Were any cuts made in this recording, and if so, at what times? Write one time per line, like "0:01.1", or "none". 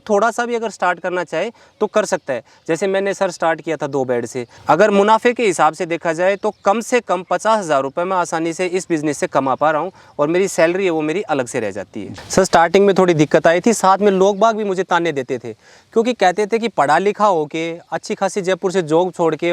0:04.4
0:12.2